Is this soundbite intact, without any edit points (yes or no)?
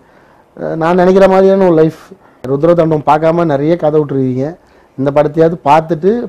no